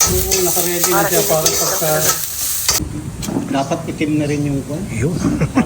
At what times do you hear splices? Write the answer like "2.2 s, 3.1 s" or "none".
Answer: 2.8 s